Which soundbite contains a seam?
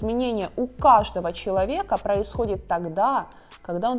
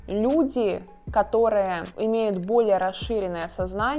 second; 1 cut; at 1.9 s

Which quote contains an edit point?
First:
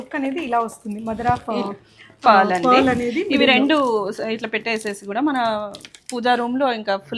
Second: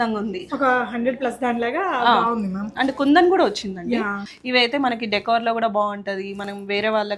second; 1 cut; at 4.2 s

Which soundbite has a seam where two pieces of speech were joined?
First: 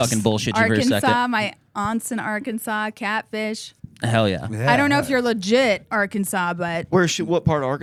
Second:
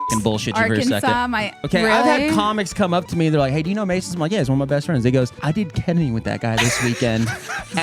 second; 2 cuts; at 1.6 s, 5.4 s

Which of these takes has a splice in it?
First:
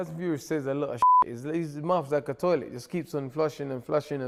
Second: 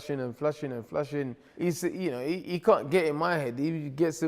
second; 1 cut; at 1.4 s

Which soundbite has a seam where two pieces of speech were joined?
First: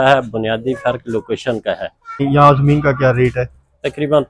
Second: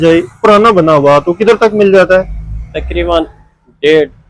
first; 1 cut; at 2.2 s

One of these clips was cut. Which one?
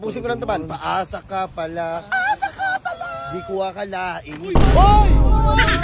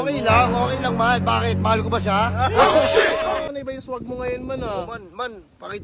second; 1 cut; at 3.5 s

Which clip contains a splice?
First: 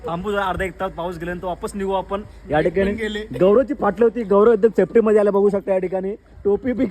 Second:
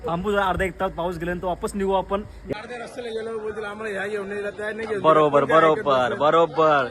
second; 1 cut; at 2.4 s

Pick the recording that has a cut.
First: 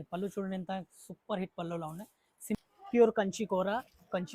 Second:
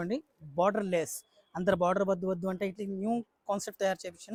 first; 1 cut; at 2.5 s

